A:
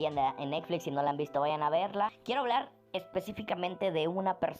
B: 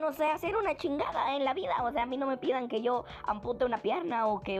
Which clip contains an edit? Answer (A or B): A